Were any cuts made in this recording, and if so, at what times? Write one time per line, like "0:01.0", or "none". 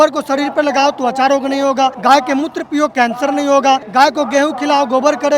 0:02.0
0:03.9